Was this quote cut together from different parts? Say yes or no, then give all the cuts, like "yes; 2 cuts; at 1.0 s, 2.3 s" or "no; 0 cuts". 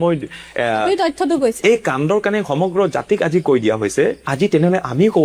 yes; 1 cut; at 1.6 s